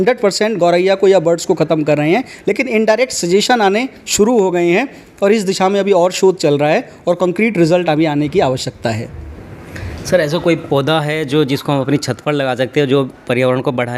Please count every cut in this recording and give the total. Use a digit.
0